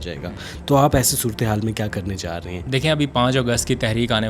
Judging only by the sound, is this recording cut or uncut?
cut